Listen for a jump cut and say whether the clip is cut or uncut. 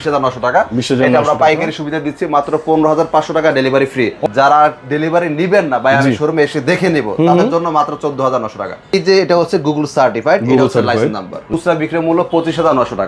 cut